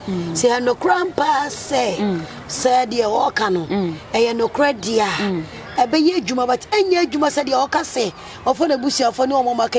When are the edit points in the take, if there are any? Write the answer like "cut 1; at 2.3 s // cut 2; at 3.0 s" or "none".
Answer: none